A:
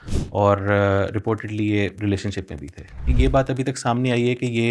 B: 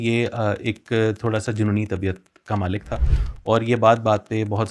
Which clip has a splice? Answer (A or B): A